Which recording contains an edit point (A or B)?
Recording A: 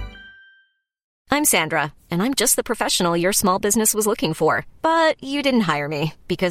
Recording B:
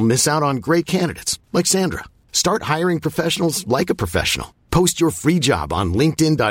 A